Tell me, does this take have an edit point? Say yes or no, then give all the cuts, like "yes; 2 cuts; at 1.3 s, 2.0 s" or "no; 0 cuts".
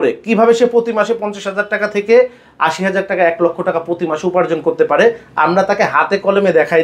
no; 0 cuts